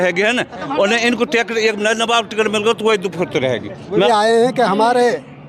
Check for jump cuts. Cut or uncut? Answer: cut